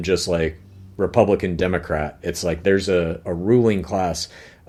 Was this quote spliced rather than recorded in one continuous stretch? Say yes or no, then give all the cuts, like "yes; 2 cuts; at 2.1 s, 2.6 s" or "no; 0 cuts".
no; 0 cuts